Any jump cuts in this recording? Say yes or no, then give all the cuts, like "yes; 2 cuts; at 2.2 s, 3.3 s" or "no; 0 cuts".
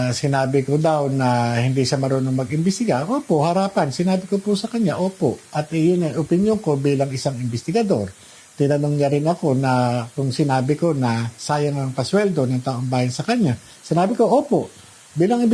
no; 0 cuts